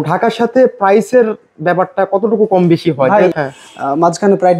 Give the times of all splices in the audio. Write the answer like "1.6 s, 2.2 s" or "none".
3.3 s